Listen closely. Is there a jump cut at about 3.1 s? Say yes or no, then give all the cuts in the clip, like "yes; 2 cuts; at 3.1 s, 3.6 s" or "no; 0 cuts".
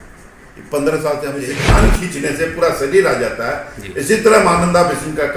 no; 1 cut; at 1.6 s